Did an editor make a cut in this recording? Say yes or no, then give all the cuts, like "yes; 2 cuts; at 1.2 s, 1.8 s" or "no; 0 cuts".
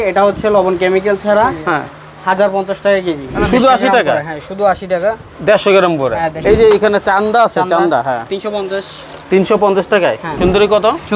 yes; 3 cuts; at 3.3 s, 6.3 s, 10.3 s